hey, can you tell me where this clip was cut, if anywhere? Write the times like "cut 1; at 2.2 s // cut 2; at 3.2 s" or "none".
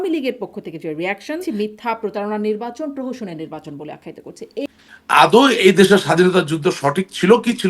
cut 1; at 1.4 s // cut 2; at 4.6 s

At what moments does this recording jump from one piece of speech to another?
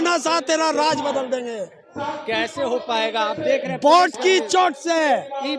none

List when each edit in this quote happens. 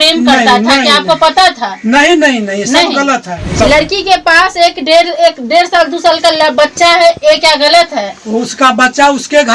cut 1; at 3.6 s

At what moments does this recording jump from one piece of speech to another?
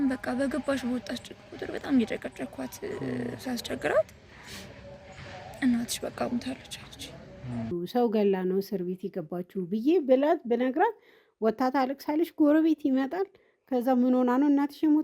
cut 1; at 7.7 s

